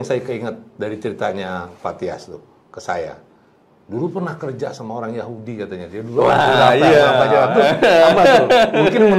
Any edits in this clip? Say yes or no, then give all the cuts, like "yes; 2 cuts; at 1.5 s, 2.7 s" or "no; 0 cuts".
no; 0 cuts